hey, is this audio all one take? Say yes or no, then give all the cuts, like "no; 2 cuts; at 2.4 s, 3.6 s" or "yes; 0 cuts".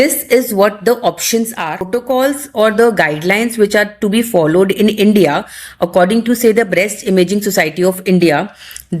no; 1 cut; at 1.9 s